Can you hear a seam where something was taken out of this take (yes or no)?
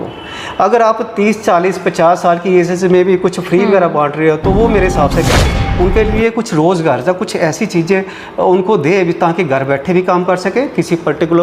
yes